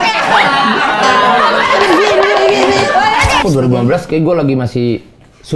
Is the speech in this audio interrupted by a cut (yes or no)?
yes